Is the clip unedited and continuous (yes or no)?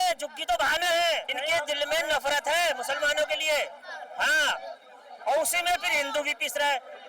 no